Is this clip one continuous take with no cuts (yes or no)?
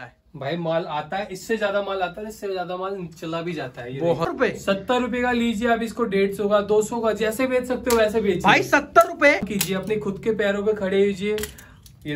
no